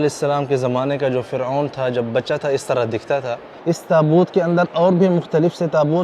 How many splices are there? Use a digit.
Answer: 1